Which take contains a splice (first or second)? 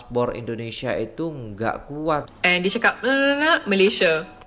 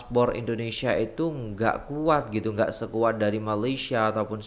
first